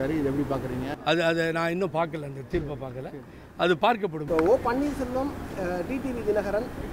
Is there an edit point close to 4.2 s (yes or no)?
yes